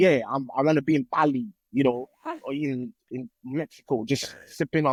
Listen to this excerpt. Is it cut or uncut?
uncut